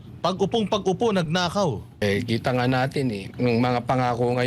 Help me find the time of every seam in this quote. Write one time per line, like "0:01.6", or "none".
0:02.0
0:03.3